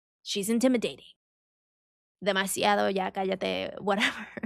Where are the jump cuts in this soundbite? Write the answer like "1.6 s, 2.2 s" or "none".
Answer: none